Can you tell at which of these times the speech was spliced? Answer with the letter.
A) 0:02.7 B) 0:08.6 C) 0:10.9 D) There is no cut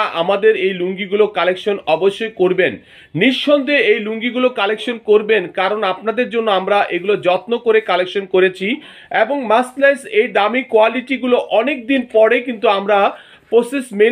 D